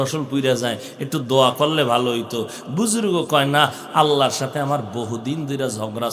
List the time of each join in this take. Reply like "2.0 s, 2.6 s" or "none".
none